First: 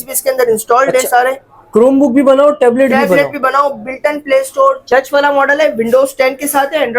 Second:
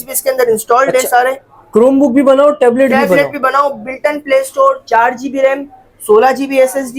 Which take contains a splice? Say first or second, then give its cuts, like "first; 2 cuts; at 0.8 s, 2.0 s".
first; 1 cut; at 4.8 s